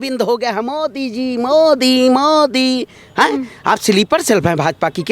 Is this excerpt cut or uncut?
uncut